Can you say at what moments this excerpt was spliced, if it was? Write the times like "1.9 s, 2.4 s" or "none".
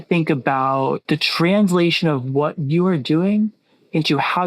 1.0 s